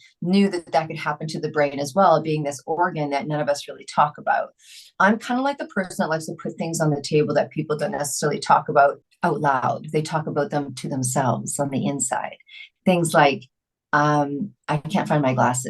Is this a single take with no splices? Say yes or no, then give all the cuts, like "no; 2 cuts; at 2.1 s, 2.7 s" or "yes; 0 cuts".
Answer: no; 1 cut; at 9.1 s